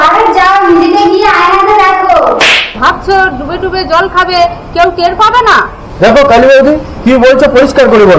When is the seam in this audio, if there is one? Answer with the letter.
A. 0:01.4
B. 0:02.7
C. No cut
B